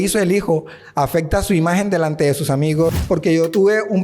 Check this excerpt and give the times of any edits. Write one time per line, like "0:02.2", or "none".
0:03.0